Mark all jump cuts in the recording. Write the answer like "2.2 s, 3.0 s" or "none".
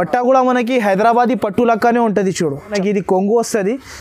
2.7 s

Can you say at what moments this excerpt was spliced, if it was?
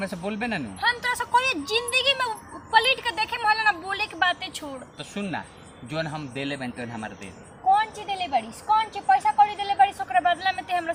none

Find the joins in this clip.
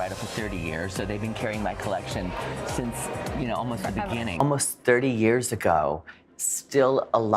4.3 s

